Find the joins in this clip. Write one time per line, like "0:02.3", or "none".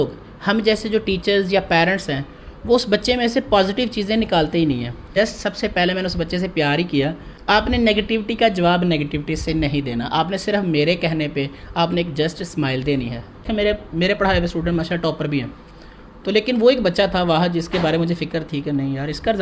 0:05.1
0:07.3
0:13.5